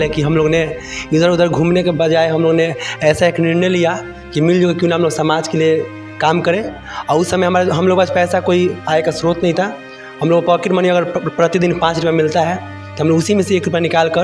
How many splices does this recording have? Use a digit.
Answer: 0